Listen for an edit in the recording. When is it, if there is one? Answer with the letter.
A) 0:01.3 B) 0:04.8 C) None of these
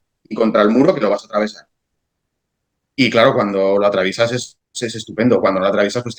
C